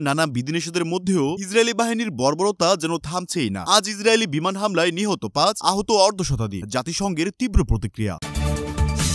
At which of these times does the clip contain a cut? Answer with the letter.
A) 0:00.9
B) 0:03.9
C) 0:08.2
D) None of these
C